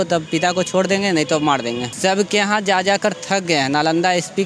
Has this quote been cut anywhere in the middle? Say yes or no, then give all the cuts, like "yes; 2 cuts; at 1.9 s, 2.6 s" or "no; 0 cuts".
yes; 1 cut; at 1.9 s